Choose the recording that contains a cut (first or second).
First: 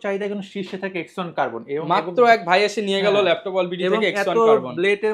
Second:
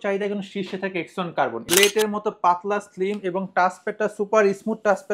second